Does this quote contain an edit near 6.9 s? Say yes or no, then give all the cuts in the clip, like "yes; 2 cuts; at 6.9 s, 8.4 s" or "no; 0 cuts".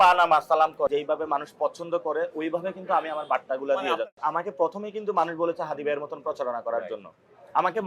no; 2 cuts; at 0.9 s, 4.0 s